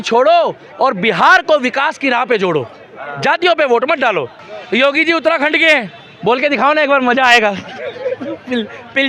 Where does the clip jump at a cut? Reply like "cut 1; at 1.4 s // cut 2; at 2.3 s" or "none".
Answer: cut 1; at 4.5 s